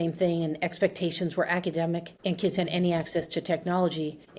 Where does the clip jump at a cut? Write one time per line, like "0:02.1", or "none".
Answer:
none